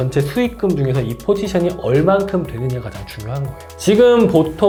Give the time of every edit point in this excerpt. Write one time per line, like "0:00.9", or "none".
none